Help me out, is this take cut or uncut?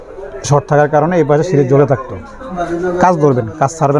cut